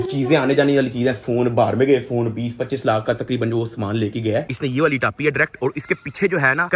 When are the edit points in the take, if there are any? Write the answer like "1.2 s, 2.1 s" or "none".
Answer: 4.4 s

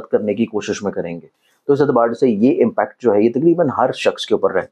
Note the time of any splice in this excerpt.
none

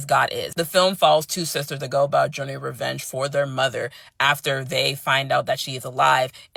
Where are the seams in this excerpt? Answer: none

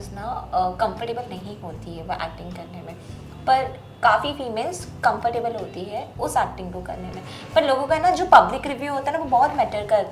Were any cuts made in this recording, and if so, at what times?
none

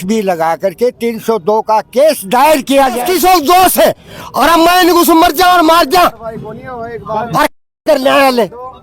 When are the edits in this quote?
3.0 s

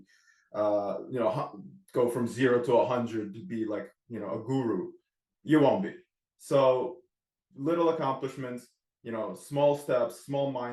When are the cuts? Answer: none

